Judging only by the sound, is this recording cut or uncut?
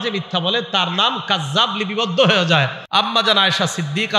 cut